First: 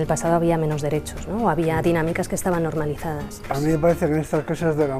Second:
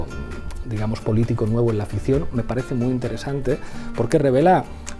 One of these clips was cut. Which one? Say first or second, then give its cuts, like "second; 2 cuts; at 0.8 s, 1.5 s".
first; 1 cut; at 3.5 s